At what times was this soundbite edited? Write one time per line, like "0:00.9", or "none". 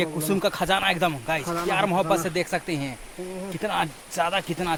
none